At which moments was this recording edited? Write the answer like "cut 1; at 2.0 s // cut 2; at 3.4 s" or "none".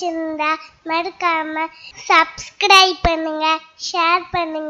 none